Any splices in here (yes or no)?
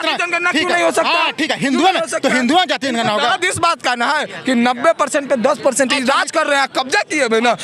no